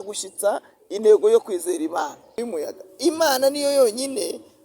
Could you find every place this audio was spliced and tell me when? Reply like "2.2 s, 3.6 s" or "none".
2.4 s